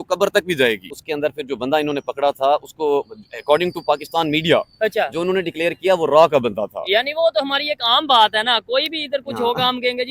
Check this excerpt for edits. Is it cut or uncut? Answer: cut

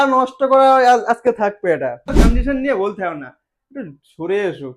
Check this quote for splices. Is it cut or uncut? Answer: cut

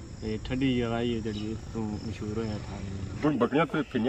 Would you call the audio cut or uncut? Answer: cut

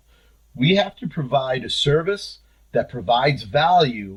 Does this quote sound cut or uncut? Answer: uncut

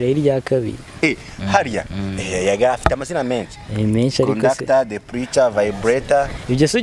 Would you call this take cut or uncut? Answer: uncut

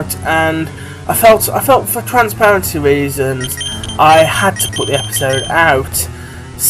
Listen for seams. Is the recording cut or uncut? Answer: cut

